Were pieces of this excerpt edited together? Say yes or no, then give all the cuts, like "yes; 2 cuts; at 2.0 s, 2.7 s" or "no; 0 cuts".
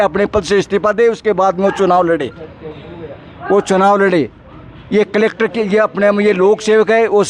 no; 0 cuts